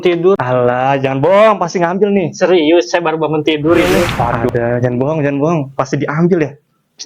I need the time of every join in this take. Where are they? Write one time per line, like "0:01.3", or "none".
0:04.5